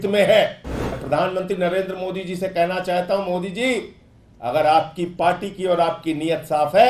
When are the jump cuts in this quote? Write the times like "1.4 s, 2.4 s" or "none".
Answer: 1.0 s

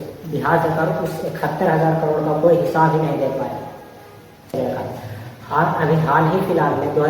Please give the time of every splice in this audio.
4.5 s

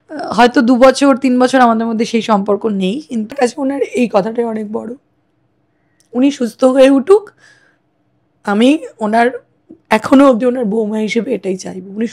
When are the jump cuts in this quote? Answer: 3.4 s

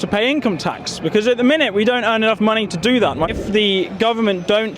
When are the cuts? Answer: 3.0 s

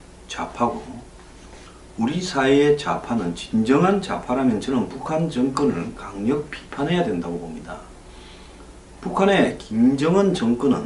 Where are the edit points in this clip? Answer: none

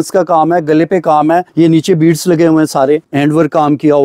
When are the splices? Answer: 1.5 s, 3.1 s

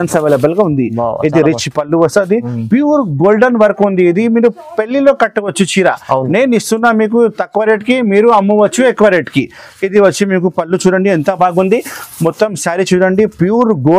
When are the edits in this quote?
none

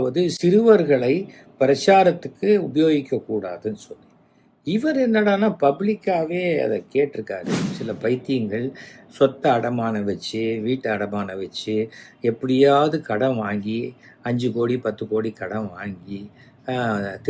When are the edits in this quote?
7.8 s

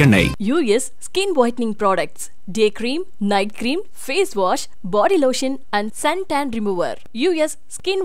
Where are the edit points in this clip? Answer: none

